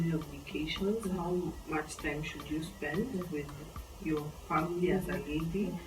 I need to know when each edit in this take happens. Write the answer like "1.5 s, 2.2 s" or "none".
none